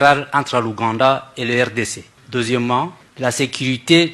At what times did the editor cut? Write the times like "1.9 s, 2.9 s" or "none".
2.2 s, 3.0 s